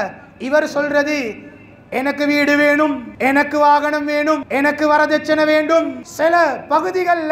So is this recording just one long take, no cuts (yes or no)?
no